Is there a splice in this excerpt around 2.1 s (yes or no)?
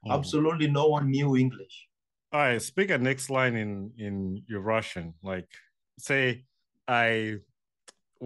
yes